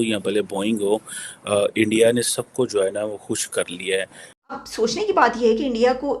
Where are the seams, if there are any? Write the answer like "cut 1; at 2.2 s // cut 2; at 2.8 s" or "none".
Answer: cut 1; at 4.4 s